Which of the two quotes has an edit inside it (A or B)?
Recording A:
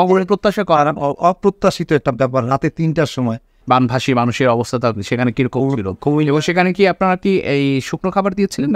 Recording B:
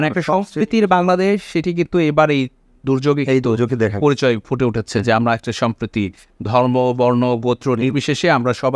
A